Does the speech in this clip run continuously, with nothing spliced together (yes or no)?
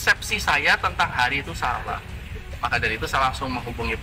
yes